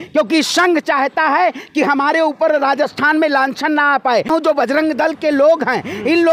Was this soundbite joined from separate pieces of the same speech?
yes; 1 cut; at 4.3 s

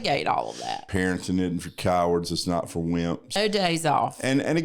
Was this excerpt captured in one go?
no; 2 cuts; at 0.9 s, 3.3 s

